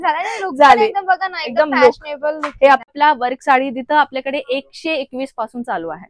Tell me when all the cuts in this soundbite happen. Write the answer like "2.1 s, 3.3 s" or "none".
2.8 s